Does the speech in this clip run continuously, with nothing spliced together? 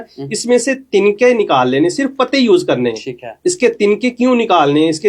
yes; 0 cuts

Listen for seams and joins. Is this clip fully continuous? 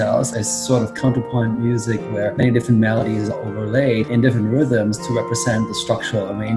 yes; 0 cuts

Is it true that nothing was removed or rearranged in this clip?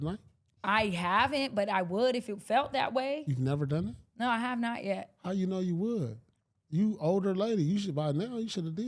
yes; 0 cuts

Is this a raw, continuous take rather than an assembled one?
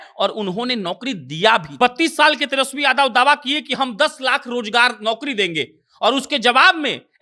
no; 1 cut; at 1.7 s

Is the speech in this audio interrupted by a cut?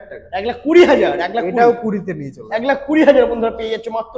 no; 0 cuts

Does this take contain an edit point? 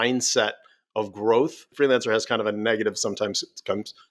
yes; 1 cut; at 1.7 s

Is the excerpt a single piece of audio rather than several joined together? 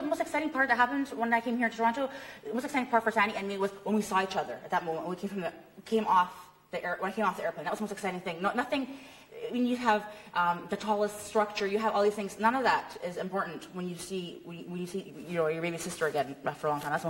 yes; 0 cuts

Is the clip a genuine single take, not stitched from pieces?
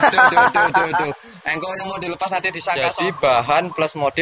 no; 1 cut; at 2.9 s

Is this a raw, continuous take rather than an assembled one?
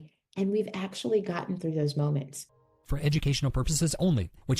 no; 1 cut; at 2.6 s

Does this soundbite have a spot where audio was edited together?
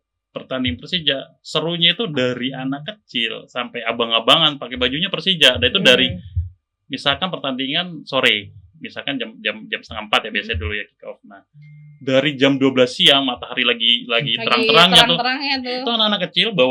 no; 0 cuts

